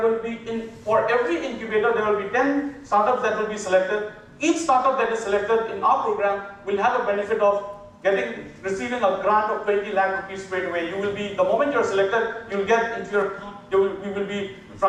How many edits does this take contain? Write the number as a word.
zero